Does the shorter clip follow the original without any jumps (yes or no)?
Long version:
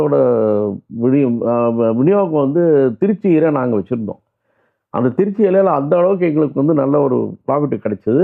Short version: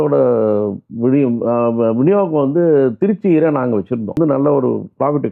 no